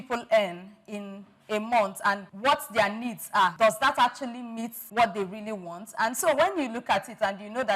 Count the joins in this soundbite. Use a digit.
3